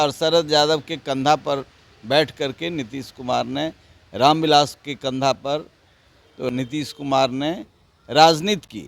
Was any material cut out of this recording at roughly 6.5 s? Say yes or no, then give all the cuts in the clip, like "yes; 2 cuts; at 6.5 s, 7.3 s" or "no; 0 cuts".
yes; 1 cut; at 6.5 s